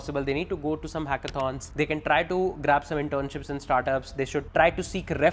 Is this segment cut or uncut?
cut